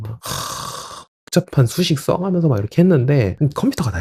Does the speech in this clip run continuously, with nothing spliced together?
yes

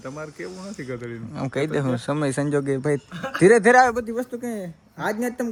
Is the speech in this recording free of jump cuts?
yes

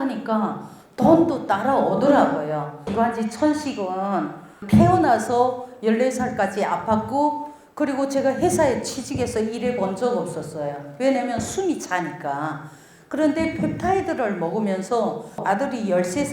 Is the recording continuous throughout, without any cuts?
no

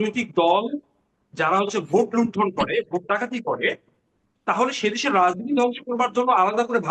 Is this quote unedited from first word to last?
yes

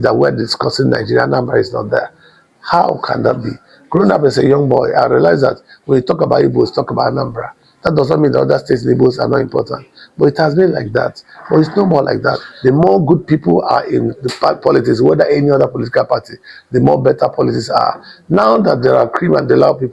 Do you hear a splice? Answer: yes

